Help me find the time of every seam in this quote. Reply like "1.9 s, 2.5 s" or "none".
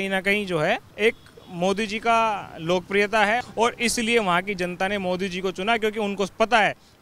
0.9 s, 3.4 s